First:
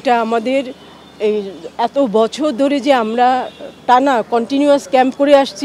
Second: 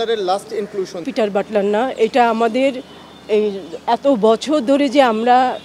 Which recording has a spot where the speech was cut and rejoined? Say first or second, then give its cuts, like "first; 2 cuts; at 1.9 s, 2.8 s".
second; 1 cut; at 1.1 s